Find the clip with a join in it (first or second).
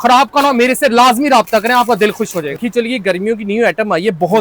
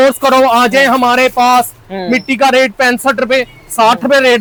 first